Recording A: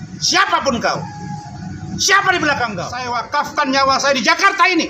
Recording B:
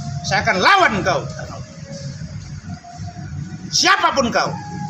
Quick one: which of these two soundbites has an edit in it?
A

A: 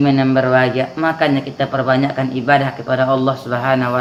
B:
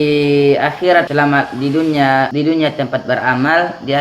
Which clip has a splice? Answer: B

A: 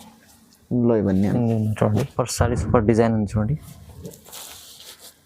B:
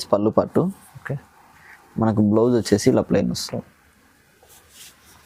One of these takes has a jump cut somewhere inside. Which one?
A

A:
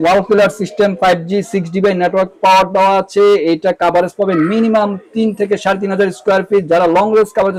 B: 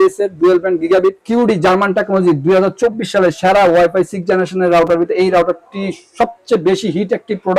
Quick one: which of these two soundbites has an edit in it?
B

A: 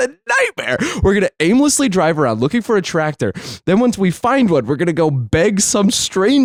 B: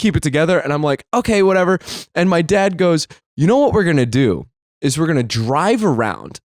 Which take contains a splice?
B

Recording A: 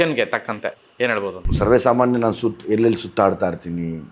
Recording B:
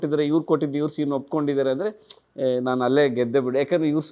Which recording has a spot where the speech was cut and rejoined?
A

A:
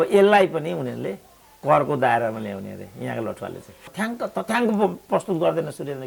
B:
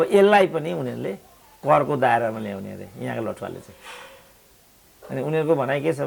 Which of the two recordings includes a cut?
A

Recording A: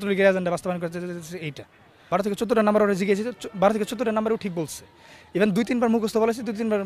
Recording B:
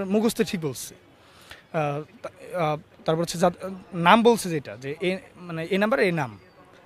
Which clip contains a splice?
A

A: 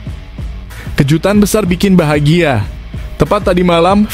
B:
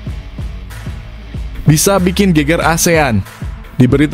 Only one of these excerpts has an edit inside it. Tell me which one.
B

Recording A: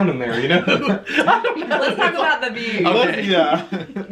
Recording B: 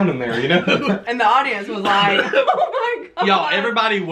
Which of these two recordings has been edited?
B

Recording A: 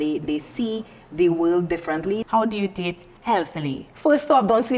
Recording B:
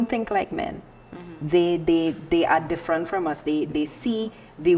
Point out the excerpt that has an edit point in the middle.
A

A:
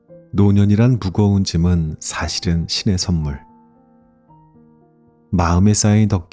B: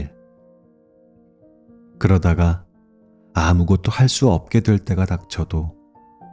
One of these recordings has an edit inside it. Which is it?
A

